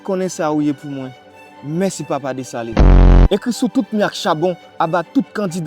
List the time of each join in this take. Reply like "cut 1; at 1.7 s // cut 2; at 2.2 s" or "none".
cut 1; at 3.1 s